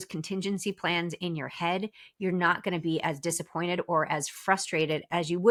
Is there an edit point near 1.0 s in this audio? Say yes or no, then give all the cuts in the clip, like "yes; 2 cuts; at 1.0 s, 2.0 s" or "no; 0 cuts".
no; 0 cuts